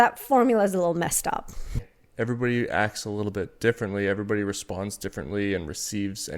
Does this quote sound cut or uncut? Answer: cut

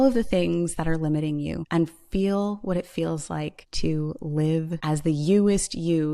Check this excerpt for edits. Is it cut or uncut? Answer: cut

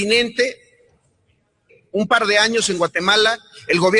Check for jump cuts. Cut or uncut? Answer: uncut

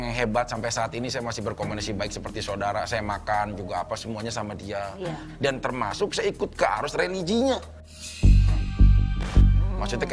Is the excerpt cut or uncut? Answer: cut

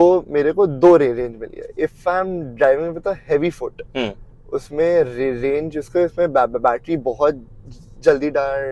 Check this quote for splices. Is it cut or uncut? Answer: uncut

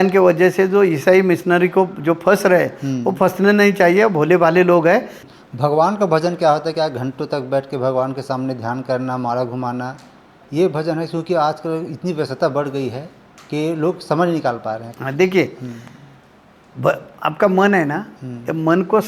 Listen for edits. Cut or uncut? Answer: cut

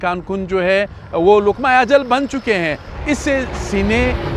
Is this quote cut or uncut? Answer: cut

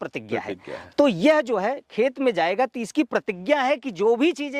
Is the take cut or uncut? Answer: uncut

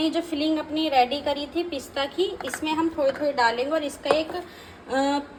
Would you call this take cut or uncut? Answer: uncut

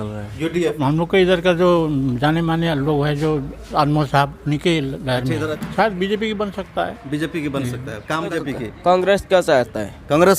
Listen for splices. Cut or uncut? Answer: cut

